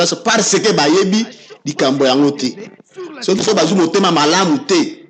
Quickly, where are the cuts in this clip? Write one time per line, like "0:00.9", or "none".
0:03.4